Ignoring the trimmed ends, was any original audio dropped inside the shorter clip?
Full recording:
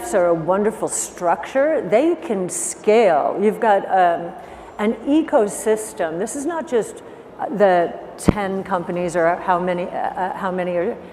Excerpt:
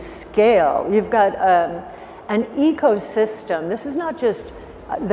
no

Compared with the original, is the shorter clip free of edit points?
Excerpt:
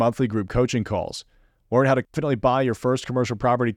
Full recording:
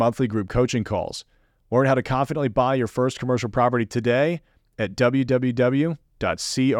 no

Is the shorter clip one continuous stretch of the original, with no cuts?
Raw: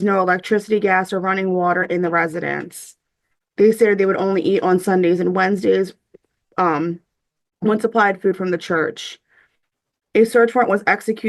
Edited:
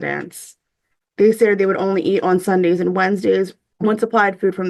no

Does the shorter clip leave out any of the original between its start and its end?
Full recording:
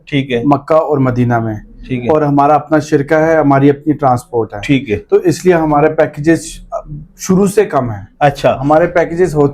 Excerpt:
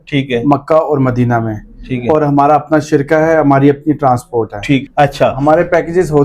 yes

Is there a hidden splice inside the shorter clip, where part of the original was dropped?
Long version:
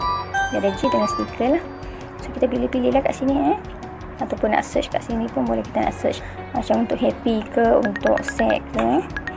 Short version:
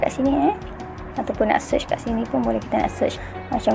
no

